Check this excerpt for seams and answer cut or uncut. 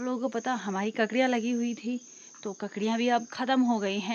uncut